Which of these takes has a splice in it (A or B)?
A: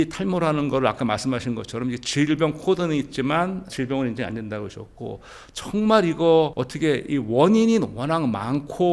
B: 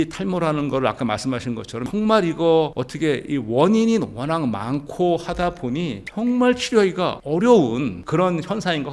B